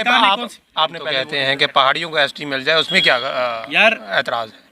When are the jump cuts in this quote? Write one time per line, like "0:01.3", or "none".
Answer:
0:01.2